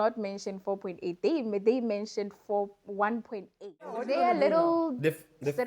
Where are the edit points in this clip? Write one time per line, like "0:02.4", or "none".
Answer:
0:04.0